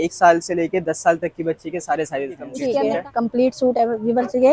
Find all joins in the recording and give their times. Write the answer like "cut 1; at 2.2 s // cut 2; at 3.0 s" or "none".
cut 1; at 2.5 s